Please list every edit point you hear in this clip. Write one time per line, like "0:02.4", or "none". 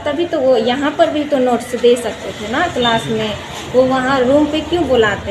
none